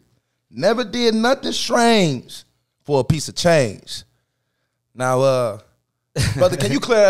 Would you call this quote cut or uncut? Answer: uncut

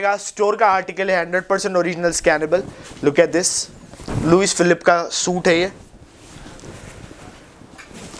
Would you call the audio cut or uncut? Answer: uncut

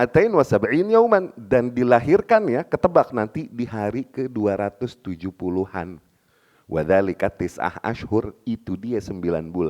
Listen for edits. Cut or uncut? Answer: uncut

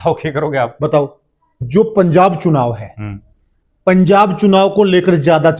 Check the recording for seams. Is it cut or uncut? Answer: cut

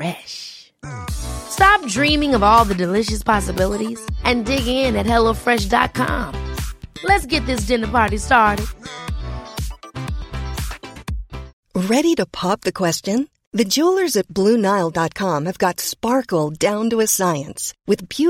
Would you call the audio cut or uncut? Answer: cut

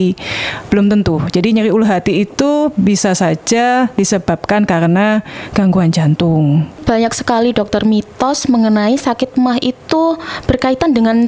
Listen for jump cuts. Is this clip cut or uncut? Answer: cut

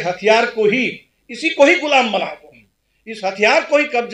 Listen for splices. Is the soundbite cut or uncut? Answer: uncut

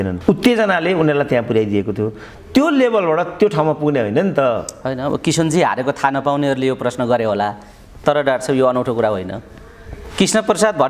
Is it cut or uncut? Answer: uncut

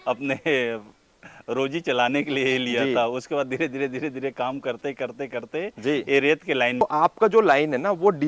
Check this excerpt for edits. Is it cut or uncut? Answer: cut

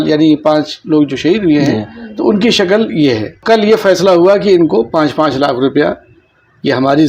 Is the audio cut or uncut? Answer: cut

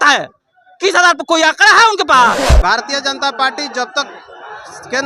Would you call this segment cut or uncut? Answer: cut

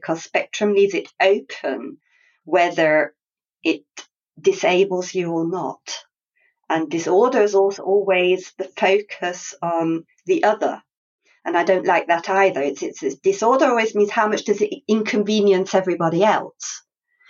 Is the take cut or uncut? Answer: uncut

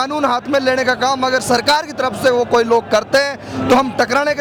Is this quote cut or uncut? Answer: uncut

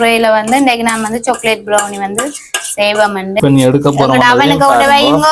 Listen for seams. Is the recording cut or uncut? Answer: cut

